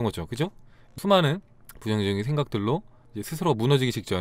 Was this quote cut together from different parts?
yes; 1 cut; at 0.9 s

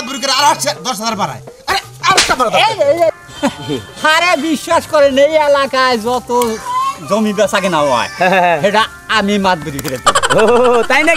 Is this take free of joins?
no; 1 cut; at 3.1 s

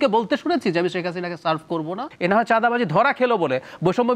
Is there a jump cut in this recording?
yes; 1 cut; at 2.1 s

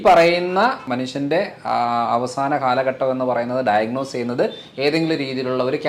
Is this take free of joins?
no; 1 cut; at 0.9 s

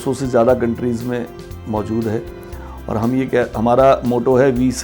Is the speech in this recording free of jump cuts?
yes; 0 cuts

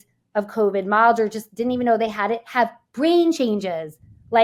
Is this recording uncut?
yes; 0 cuts

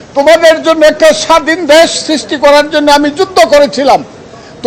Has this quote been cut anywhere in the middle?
no; 0 cuts

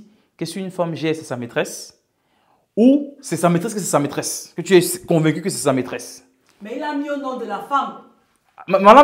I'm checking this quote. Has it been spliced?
no; 0 cuts

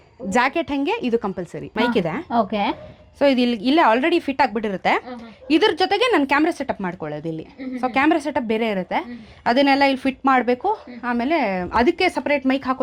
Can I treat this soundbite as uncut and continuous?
no; 1 cut; at 1.7 s

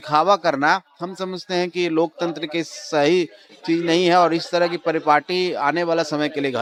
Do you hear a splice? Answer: no; 0 cuts

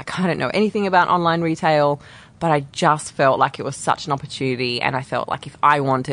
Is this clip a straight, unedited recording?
yes; 0 cuts

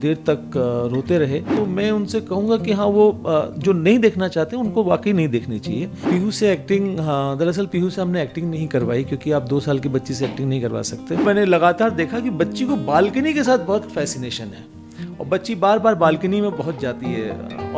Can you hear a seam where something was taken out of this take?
yes; 3 cuts; at 1.5 s, 6.1 s, 11.2 s

